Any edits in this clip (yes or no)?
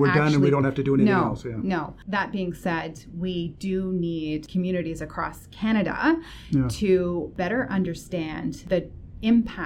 yes